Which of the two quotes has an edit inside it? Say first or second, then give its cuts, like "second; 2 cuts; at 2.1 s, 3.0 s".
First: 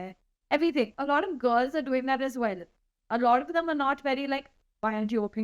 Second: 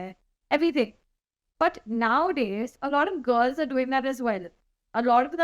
first; 1 cut; at 1.0 s